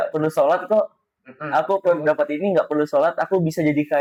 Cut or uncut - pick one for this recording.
uncut